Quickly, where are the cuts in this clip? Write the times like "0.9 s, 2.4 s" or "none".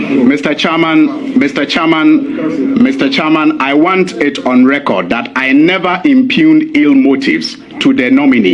none

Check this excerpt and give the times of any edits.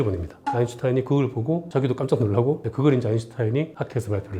none

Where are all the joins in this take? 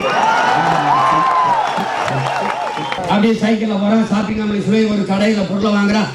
3.0 s

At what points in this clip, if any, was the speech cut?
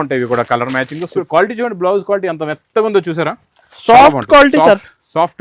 1.1 s

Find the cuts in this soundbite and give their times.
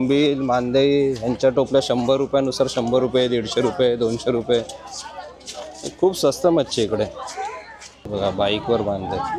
none

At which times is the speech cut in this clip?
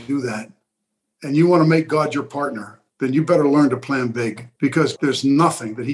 4.9 s

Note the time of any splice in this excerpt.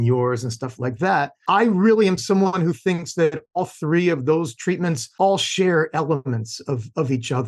1.4 s, 5.0 s

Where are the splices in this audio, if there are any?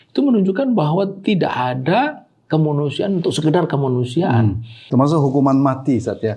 4.7 s

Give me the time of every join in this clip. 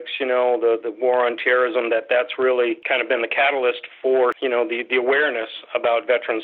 2.8 s, 4.4 s

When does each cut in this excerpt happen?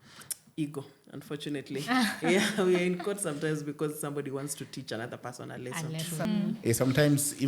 6.3 s

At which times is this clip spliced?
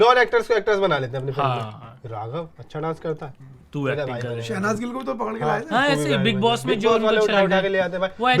none

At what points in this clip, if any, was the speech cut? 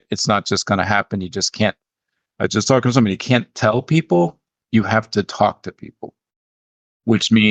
none

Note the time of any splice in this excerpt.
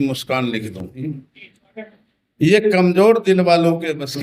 1.0 s

